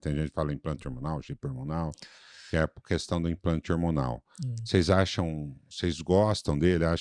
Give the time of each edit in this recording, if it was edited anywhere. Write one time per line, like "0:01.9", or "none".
none